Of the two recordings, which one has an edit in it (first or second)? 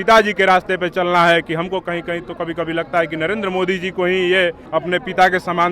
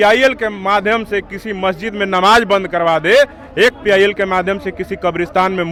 first